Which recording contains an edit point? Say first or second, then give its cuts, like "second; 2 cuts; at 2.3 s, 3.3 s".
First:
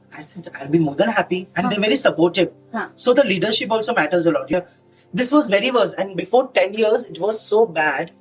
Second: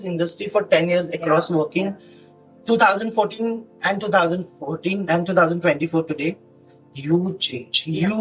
first; 1 cut; at 4.5 s